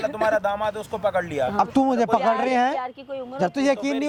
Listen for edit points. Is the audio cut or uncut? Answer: uncut